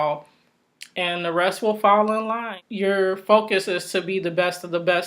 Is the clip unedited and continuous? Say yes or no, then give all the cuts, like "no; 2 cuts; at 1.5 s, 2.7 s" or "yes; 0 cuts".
no; 1 cut; at 2.4 s